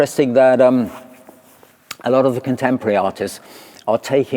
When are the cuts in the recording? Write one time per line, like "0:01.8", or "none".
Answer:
none

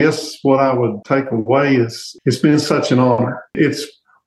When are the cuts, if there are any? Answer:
0:01.0
0:02.0
0:03.6

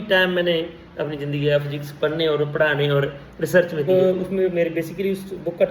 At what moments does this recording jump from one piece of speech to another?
0:03.9

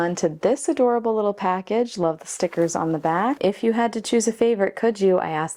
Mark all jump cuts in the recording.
0:03.4

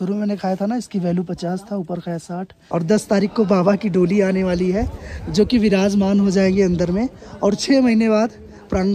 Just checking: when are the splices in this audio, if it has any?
0:02.5

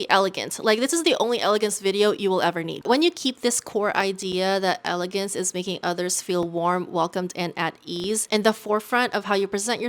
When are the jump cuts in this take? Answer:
0:02.8

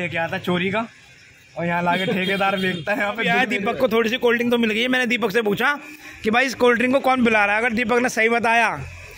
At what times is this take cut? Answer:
0:03.4

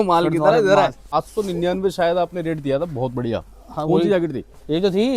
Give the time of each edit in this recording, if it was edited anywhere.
0:01.2

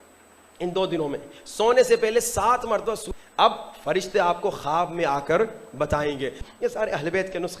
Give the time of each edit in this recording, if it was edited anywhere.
0:03.0
0:06.4

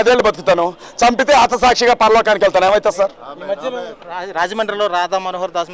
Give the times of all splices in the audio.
none

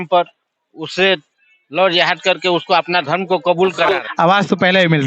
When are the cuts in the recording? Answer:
0:03.9

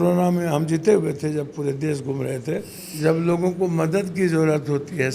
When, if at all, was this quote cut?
0:02.8

